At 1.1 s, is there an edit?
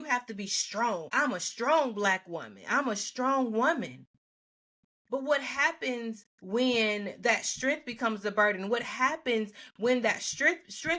yes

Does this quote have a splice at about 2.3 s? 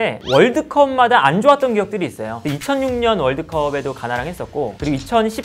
yes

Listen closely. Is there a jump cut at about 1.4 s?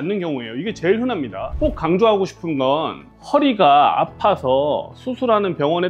yes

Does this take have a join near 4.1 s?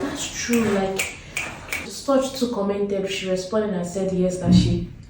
no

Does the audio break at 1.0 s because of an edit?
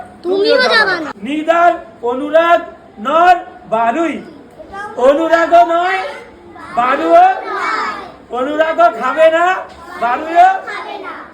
yes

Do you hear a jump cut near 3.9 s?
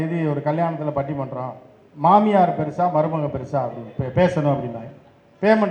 no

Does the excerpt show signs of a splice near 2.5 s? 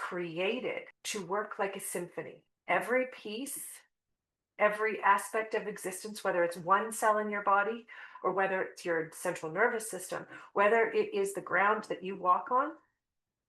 yes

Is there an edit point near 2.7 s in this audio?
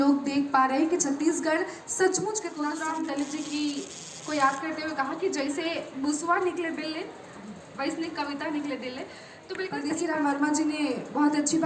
yes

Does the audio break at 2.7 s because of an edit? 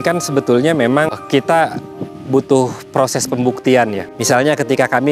no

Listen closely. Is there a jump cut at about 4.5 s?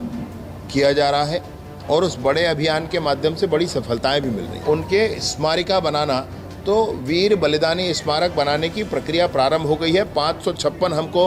yes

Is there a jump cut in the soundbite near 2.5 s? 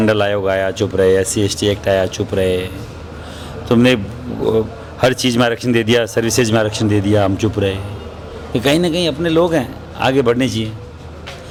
no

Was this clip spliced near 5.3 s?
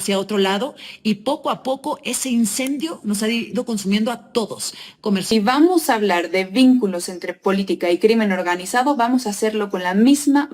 yes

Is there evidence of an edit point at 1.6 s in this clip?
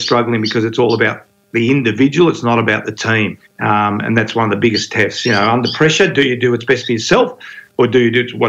no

